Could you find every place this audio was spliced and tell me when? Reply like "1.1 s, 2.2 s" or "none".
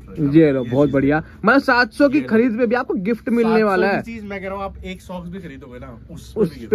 none